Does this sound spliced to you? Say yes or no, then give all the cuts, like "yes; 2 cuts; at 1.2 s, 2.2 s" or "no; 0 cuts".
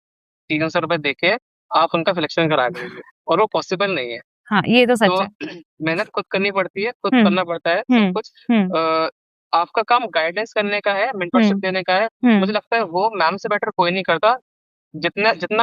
no; 0 cuts